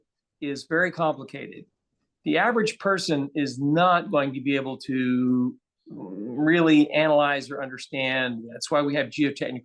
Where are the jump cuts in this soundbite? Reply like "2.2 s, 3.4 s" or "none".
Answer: none